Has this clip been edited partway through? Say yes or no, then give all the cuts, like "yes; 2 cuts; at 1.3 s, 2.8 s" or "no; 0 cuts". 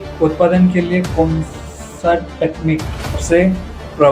yes; 1 cut; at 3.2 s